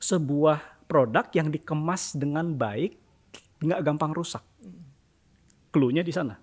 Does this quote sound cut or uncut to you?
uncut